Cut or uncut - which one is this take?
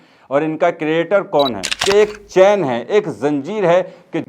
cut